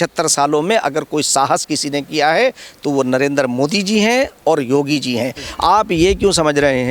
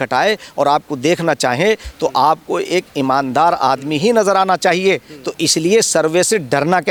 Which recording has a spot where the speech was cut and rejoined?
first; 1 cut; at 5.4 s

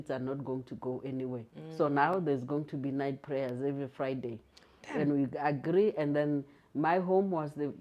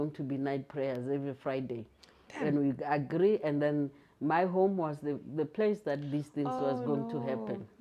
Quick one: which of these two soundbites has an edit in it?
first; 1 cut; at 1.5 s

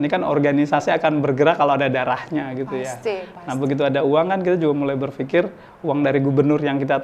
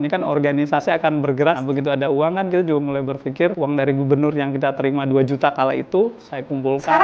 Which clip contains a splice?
second; 2 cuts; at 1.6 s, 3.6 s

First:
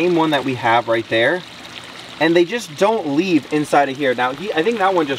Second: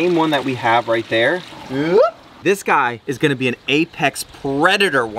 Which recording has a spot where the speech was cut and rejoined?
second; 2 cuts; at 1.6 s, 2.8 s

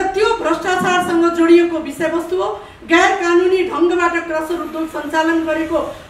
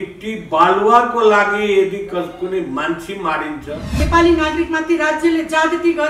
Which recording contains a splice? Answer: second; 1 cut; at 4.0 s

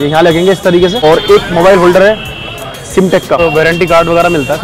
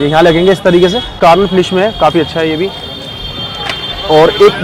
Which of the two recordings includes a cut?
first; 2 cuts; at 1.0 s, 3.4 s

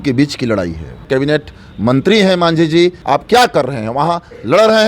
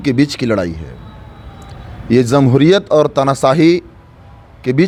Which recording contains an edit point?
first; 2 cuts; at 1.0 s, 3.0 s

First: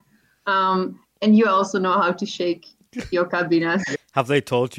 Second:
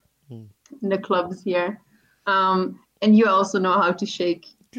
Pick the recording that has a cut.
first; 1 cut; at 3.9 s

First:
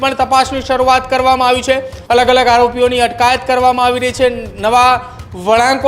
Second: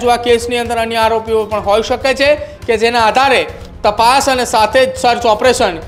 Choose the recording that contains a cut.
first; 1 cut; at 1.9 s

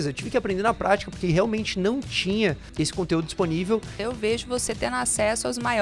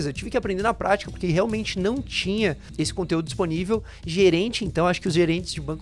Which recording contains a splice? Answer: first; 1 cut; at 3.9 s

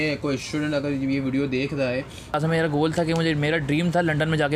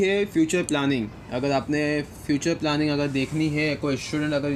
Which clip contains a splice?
first; 1 cut; at 2.3 s

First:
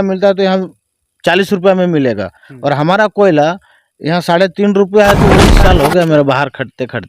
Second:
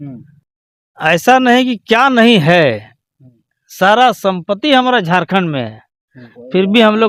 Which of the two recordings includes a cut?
first; 1 cut; at 5.5 s

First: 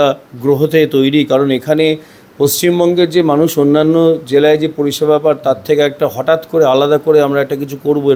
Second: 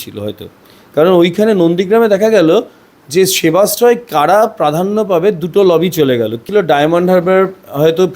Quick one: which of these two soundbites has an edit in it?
second; 1 cut; at 6.4 s

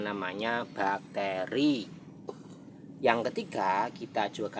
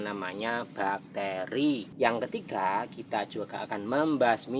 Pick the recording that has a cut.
second; 1 cut; at 1.9 s

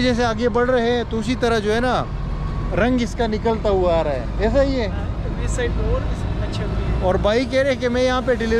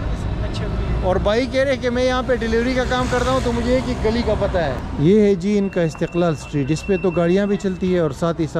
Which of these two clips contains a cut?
second; 1 cut; at 4.8 s

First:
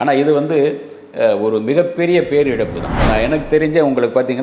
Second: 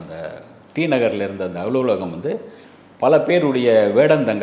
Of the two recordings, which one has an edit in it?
first; 1 cut; at 3.1 s

